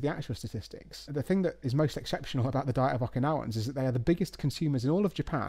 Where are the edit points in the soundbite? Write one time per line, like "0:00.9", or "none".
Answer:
0:01.1